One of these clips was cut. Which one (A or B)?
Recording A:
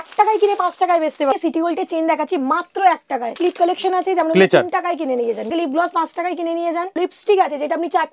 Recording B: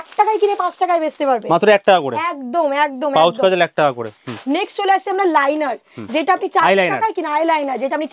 A